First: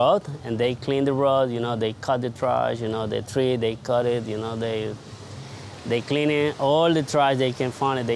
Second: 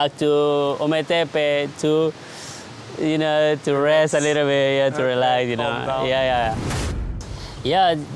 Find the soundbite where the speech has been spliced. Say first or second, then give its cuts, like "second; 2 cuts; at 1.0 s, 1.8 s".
second; 1 cut; at 7.1 s